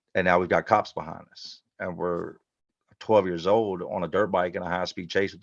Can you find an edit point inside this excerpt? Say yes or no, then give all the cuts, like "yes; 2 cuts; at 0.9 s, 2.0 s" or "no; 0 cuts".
no; 0 cuts